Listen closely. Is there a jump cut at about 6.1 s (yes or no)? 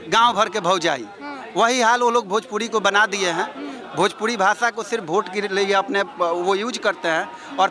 no